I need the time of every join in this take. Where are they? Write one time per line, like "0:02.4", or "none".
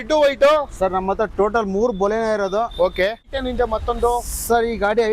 0:03.3